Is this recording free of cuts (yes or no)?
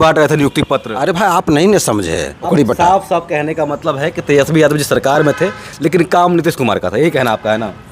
no